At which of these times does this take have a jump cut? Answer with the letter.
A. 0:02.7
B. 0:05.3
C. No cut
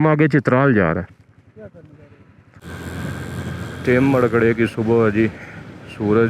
A